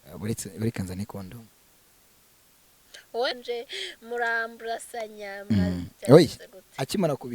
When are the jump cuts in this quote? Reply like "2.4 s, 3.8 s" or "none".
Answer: 3.3 s